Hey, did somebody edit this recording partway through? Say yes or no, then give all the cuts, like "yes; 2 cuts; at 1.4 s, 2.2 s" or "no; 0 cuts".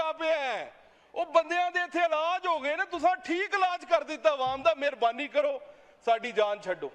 no; 0 cuts